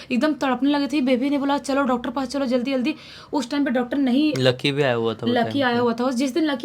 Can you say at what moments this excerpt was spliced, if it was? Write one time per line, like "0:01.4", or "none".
none

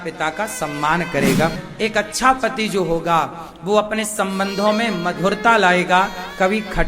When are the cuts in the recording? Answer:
0:01.6

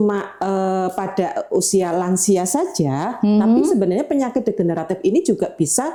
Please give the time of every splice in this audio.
none

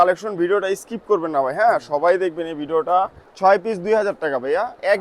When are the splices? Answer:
0:03.2

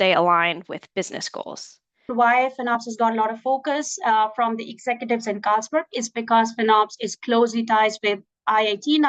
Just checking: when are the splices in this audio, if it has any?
0:02.1

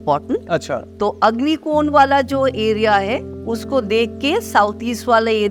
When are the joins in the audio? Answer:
none

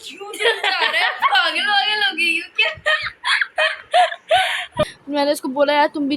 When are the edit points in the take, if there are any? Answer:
0:04.8

